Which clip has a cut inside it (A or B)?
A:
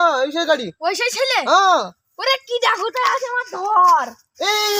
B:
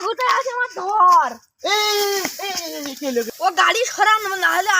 B